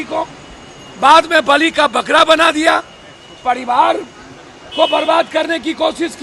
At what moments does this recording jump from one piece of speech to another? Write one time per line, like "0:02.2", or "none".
none